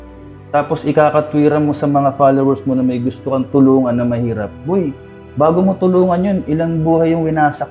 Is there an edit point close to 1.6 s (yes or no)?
no